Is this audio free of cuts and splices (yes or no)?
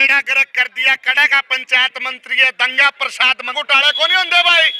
no